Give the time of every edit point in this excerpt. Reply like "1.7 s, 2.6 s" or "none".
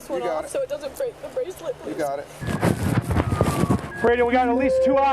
2.5 s